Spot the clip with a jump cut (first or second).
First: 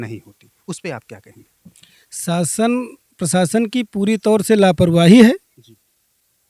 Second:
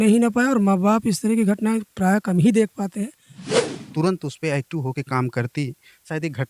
second